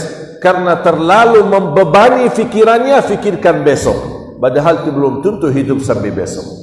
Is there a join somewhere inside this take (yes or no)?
no